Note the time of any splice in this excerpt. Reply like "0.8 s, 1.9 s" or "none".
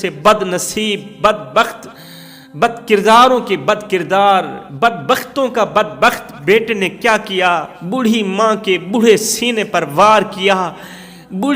none